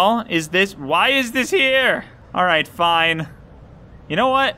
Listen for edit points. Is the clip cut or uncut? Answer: cut